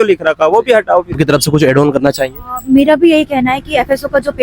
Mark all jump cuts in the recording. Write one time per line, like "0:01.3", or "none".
0:01.1